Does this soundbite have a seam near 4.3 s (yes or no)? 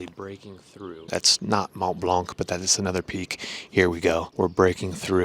yes